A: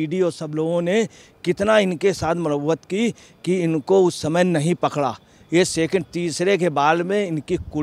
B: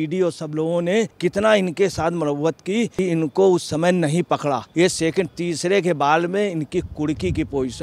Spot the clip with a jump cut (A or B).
B